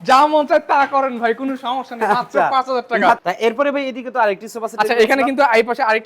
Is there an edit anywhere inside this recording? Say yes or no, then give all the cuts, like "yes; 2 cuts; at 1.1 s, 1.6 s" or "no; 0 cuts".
yes; 1 cut; at 3.2 s